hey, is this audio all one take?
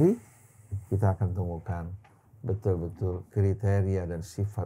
yes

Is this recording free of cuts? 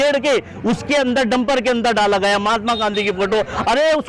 yes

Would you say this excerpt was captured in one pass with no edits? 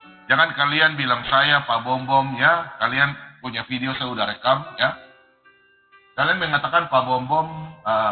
yes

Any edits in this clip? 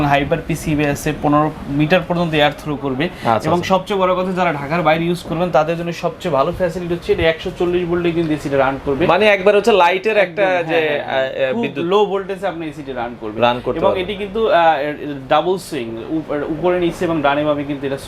no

